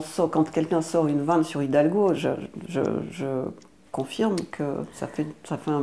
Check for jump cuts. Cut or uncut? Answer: uncut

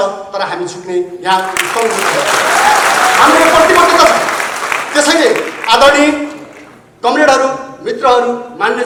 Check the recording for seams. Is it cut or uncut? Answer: uncut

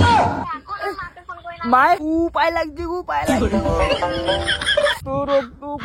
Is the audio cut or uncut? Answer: cut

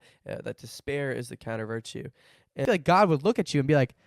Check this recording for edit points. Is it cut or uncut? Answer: cut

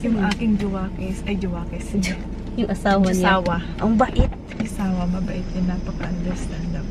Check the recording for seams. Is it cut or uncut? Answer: uncut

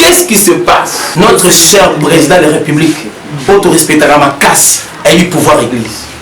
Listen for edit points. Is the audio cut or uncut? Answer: cut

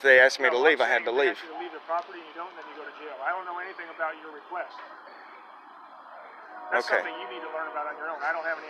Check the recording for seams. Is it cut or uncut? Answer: uncut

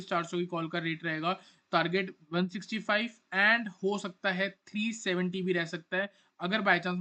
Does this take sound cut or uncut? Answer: uncut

